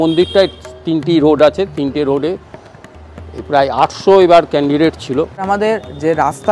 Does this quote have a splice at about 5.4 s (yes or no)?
yes